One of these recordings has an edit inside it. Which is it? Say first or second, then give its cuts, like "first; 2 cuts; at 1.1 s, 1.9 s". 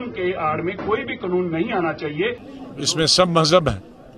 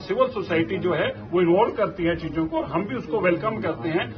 first; 1 cut; at 2.5 s